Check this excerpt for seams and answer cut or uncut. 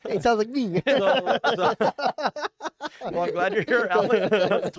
uncut